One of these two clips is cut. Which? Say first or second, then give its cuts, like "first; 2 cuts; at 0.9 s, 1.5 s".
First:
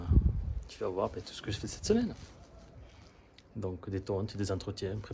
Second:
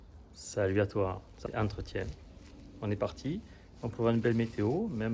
second; 1 cut; at 1.3 s